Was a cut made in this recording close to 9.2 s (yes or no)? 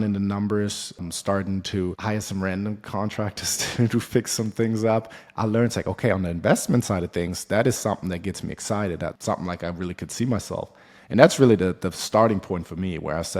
yes